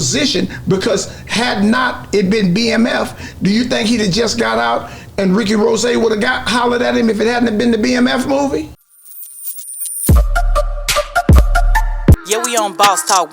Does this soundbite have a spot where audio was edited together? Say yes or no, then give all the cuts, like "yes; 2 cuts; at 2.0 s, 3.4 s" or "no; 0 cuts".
yes; 1 cut; at 8.8 s